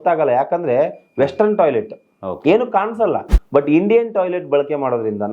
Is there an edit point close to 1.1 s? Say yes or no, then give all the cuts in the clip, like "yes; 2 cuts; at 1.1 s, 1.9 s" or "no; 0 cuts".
no; 1 cut; at 3.3 s